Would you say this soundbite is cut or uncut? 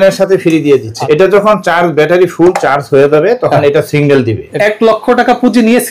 cut